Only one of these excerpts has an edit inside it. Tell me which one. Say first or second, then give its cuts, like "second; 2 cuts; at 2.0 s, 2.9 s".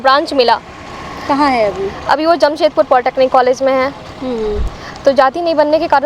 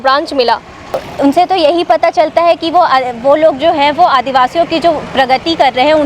second; 1 cut; at 1.1 s